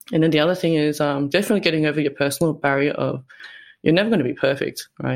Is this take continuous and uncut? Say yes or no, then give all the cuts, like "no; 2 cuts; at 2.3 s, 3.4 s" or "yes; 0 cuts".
yes; 0 cuts